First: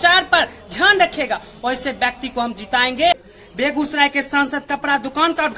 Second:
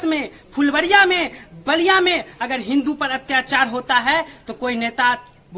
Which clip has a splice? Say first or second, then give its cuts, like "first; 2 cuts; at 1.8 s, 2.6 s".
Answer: first; 1 cut; at 3.1 s